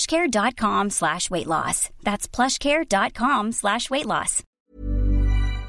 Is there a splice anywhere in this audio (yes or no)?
yes